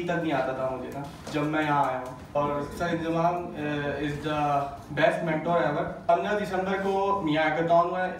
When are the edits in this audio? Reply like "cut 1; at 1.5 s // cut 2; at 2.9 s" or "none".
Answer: cut 1; at 2.4 s // cut 2; at 6.1 s